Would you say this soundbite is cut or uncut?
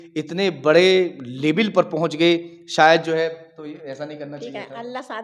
uncut